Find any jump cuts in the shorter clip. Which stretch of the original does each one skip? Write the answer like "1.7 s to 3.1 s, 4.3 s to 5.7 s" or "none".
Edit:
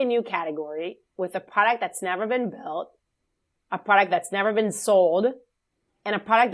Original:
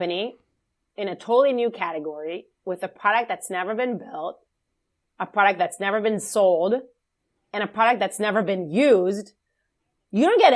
none